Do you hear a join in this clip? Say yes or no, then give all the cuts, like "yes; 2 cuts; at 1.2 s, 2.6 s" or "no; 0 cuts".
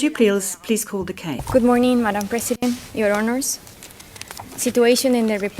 yes; 1 cut; at 1.3 s